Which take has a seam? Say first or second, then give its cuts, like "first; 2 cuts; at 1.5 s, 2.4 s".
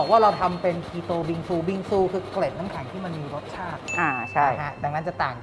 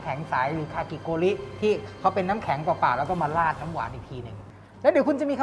second; 1 cut; at 4.4 s